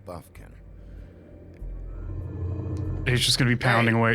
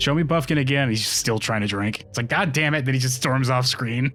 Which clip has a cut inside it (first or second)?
first